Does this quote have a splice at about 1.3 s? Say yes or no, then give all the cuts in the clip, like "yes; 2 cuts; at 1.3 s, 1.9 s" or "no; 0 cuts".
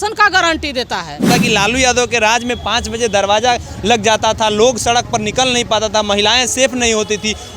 yes; 1 cut; at 1.3 s